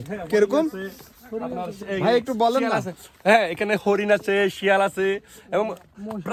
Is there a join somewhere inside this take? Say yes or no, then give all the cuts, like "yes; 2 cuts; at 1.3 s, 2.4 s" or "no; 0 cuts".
no; 0 cuts